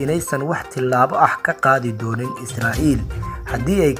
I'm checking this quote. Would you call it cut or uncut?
uncut